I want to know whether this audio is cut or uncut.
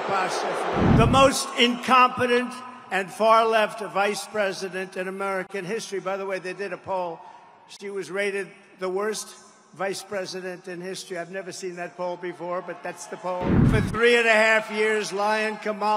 cut